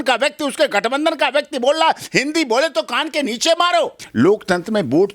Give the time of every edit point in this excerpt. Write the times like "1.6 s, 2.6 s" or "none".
4.0 s